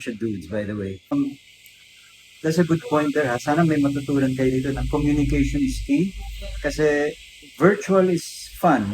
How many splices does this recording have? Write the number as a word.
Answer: one